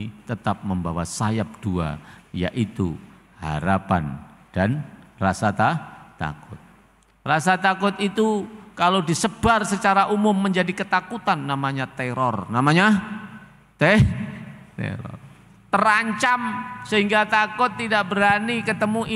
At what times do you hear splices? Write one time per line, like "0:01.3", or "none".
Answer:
none